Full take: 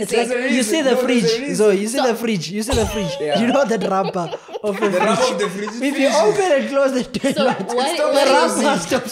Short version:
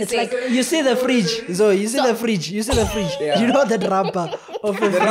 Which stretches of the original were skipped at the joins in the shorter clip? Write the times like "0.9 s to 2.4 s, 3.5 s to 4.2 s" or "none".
none